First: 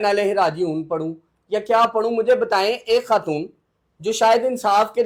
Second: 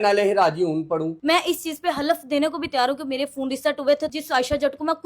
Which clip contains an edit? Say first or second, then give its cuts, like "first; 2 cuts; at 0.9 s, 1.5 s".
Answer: second; 2 cuts; at 1.1 s, 4.1 s